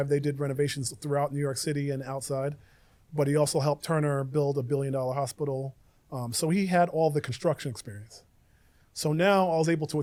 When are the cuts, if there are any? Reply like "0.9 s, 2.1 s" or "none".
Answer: none